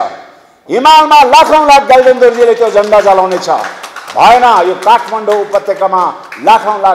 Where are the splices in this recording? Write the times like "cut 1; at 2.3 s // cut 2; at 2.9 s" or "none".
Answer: none